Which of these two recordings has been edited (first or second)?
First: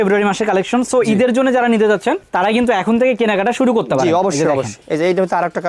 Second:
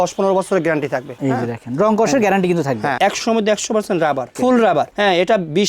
second